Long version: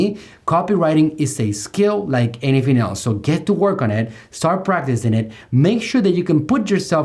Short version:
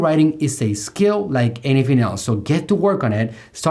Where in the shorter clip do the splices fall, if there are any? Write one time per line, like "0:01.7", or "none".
none

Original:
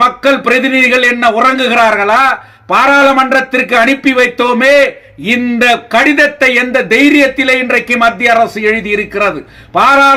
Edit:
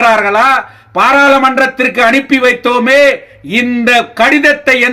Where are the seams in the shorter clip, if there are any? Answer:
none

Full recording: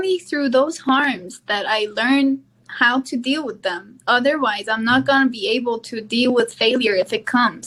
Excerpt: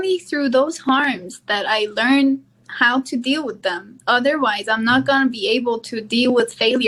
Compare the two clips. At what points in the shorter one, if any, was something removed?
none

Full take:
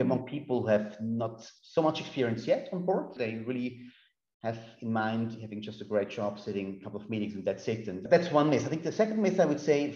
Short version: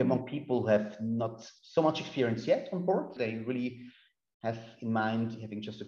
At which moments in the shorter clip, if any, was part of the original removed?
none

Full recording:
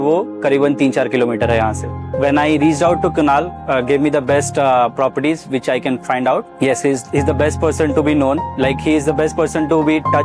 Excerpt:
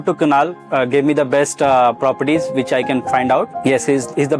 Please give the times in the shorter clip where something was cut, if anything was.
none

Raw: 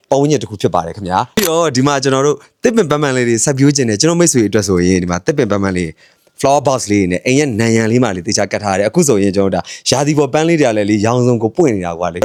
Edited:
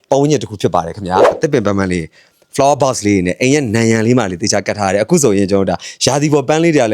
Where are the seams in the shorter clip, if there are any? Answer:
0:01.3

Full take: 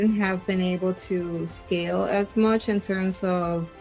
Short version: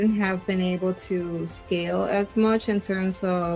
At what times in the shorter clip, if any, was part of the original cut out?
none

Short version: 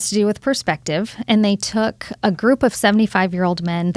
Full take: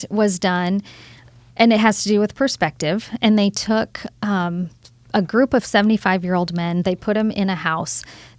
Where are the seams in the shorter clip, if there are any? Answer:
0:02.1

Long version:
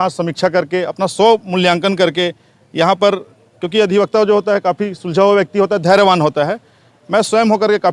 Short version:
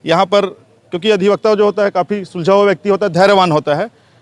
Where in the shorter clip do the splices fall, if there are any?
none

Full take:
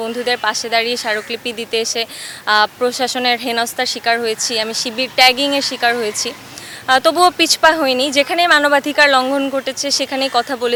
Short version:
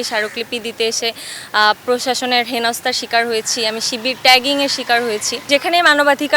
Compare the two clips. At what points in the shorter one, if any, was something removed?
0:05.4

